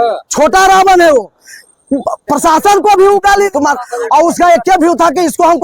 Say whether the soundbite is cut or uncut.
cut